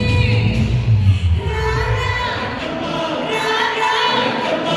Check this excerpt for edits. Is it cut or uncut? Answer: uncut